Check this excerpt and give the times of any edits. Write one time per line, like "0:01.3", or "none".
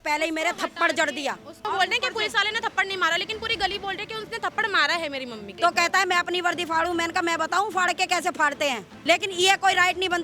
0:01.6
0:05.5
0:08.9